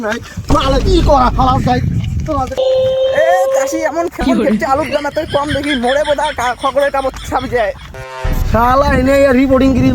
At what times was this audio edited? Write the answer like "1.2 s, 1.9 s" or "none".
2.6 s, 7.9 s